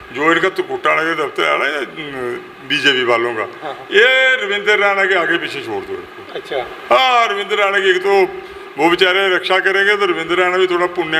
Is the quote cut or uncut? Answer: uncut